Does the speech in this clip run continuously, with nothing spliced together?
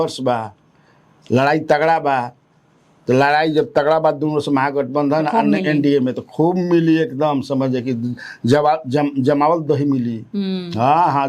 yes; 0 cuts

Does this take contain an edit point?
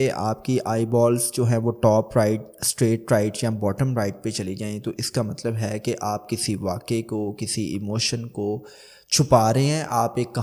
no; 0 cuts

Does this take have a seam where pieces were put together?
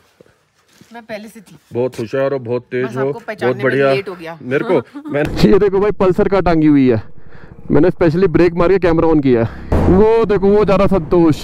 yes; 2 cuts; at 5.2 s, 9.7 s

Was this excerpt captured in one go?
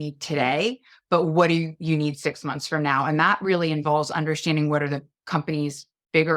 yes; 0 cuts

